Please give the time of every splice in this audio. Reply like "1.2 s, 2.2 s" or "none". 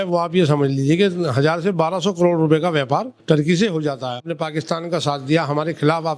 3.1 s, 4.3 s